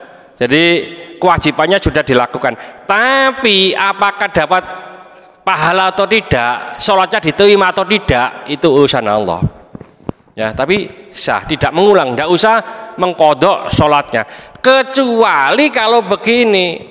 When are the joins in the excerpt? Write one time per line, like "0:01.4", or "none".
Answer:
none